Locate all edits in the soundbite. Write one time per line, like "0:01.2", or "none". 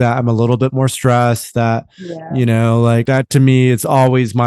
0:03.0